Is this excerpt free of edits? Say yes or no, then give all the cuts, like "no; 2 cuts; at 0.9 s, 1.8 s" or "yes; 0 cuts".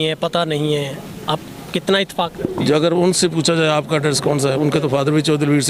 yes; 0 cuts